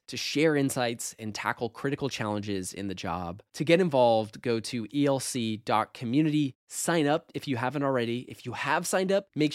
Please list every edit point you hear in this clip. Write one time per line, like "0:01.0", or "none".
none